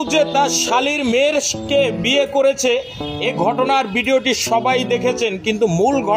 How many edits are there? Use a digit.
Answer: 0